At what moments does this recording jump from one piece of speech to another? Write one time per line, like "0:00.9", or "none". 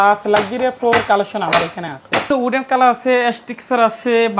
0:02.3